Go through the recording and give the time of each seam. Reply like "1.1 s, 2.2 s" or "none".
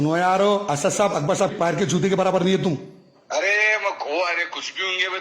1.5 s